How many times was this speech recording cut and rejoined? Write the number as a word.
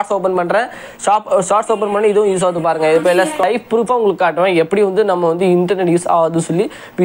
one